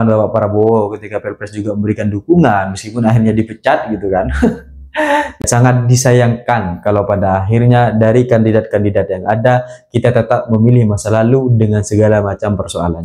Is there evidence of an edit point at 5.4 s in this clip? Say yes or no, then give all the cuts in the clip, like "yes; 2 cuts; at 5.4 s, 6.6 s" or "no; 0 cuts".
yes; 1 cut; at 5.4 s